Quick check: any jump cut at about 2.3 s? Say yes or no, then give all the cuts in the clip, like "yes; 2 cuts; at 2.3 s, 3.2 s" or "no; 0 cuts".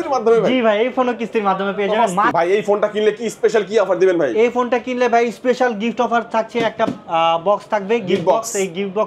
yes; 1 cut; at 2.3 s